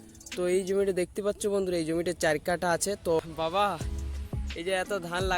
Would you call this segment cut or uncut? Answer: cut